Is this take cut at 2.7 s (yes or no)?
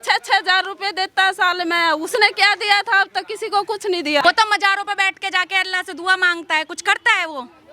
no